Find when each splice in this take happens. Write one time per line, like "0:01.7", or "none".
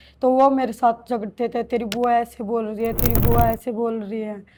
none